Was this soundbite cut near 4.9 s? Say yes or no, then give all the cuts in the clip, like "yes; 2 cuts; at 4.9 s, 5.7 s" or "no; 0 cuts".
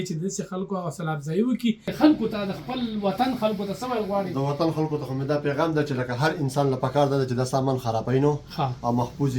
no; 1 cut; at 1.9 s